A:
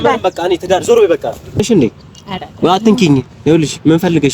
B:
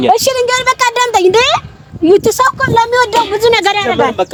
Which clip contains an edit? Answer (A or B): A